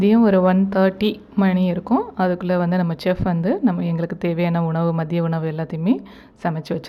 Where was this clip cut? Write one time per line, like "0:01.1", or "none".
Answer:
none